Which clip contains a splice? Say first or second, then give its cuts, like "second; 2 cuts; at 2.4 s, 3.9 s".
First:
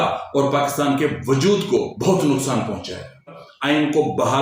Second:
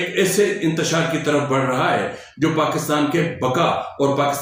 first; 2 cuts; at 1.9 s, 3.5 s